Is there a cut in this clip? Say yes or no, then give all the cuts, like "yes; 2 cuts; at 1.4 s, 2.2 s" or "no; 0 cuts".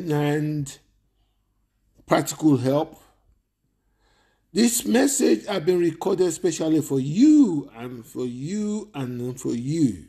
no; 0 cuts